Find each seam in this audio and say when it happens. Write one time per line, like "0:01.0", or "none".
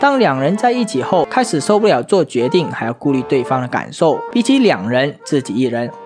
0:01.3
0:04.2